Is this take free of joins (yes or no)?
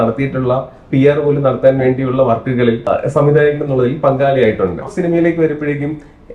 no